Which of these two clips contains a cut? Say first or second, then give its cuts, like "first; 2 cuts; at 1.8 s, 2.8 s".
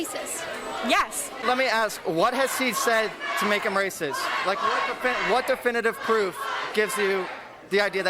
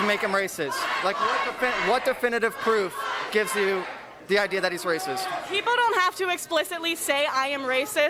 first; 1 cut; at 1.4 s